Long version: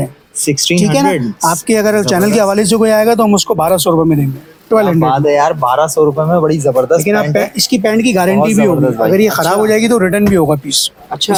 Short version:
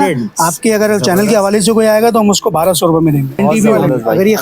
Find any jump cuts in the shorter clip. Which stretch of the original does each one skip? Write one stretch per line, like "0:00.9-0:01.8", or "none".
0:04.4-0:08.3